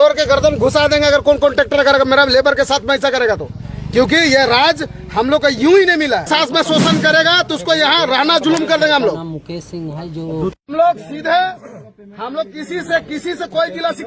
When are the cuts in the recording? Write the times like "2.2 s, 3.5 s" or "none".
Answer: 6.3 s